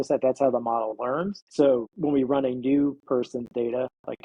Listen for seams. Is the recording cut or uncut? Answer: cut